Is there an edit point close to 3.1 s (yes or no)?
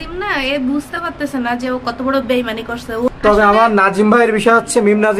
yes